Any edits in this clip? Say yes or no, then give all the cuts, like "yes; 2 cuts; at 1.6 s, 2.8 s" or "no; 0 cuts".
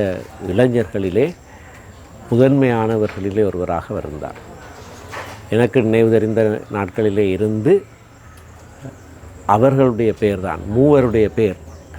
no; 0 cuts